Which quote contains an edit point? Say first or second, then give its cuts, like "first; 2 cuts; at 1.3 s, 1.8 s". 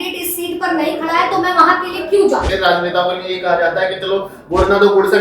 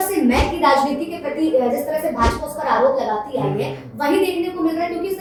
first; 1 cut; at 2.5 s